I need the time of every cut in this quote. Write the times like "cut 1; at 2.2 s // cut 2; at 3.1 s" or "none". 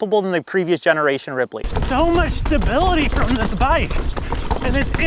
cut 1; at 1.7 s